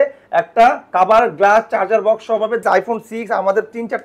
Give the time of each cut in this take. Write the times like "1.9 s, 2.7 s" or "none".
2.6 s

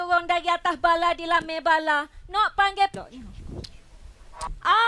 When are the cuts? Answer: 2.9 s

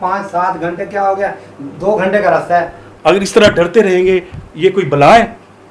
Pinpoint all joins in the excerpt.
2.8 s

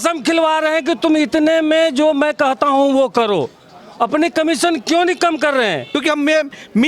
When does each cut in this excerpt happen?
5.8 s

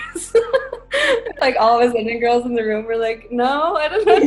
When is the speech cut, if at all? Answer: 1.3 s

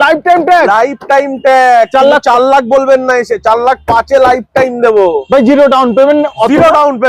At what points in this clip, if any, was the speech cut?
none

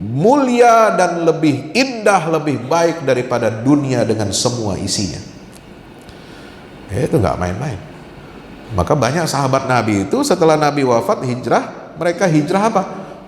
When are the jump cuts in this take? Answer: none

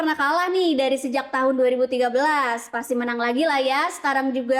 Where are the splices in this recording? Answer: none

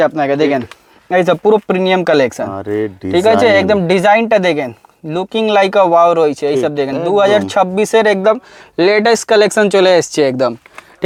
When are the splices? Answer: none

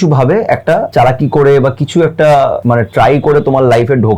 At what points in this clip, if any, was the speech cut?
0.9 s, 2.6 s

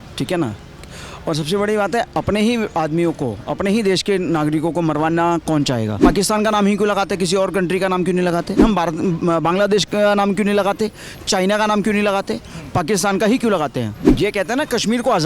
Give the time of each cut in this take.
6.0 s, 8.6 s, 14.0 s

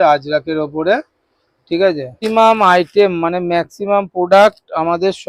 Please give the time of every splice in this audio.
2.1 s

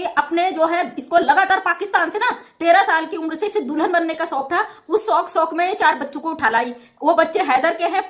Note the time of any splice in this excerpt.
none

